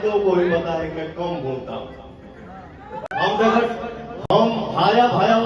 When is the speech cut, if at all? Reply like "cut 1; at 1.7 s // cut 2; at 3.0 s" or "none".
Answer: none